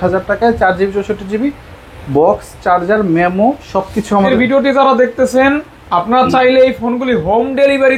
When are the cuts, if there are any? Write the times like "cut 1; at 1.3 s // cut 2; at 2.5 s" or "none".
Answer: cut 1; at 4.3 s